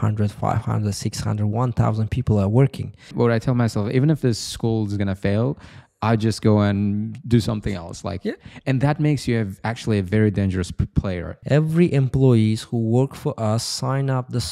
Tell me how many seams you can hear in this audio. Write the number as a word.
two